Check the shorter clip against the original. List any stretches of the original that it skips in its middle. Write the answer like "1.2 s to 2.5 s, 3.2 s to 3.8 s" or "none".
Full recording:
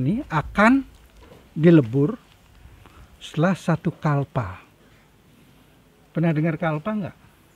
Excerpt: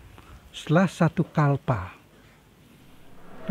none

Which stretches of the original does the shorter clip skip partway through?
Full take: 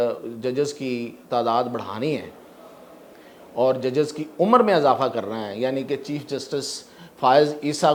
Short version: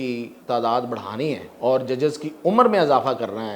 2.3 s to 3.4 s

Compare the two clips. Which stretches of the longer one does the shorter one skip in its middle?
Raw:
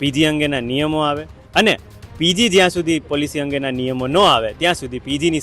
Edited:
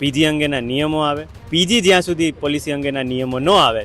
1.3 s to 2.0 s

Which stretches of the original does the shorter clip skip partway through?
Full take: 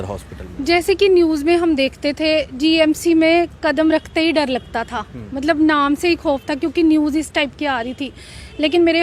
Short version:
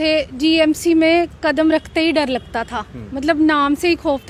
none

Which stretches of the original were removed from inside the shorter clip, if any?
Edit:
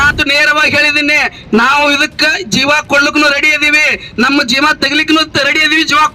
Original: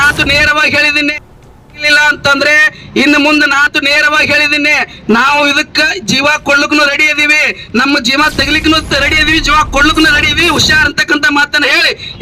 1.1 s to 4.6 s

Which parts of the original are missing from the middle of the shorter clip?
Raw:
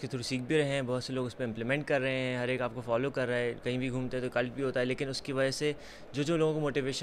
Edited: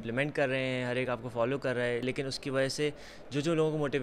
3.6 s to 4.9 s

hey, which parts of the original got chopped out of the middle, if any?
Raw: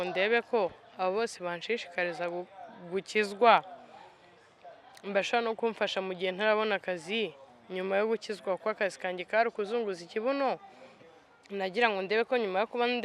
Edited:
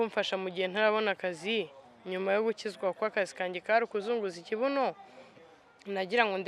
none

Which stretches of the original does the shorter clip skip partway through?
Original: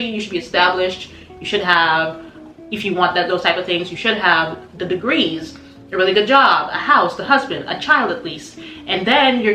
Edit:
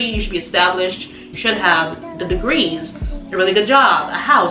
1.3 s to 3.9 s

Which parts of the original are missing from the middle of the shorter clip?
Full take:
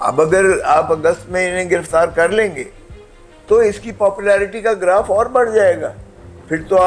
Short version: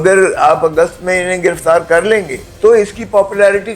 2.7 s to 3.3 s

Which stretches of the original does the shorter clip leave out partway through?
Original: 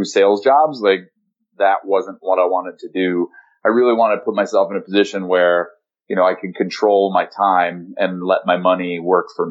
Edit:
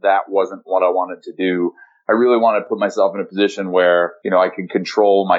5.7 s to 6.0 s

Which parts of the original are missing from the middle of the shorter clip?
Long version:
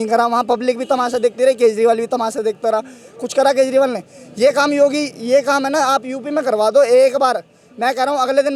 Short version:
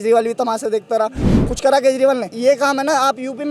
4.0 s to 5.2 s

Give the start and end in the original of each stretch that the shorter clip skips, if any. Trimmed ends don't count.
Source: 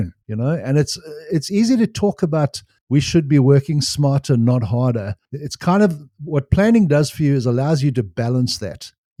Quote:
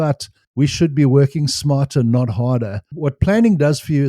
5.2 s to 6.1 s

